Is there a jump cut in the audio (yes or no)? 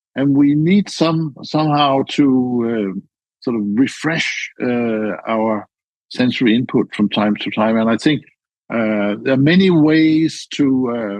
yes